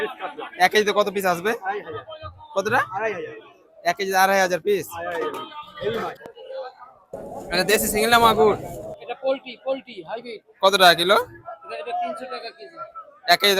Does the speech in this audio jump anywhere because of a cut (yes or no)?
yes